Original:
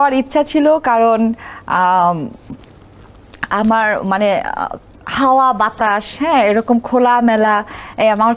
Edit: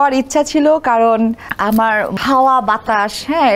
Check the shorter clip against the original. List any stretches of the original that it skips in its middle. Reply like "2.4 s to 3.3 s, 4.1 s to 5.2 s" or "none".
1.7 s to 4.6 s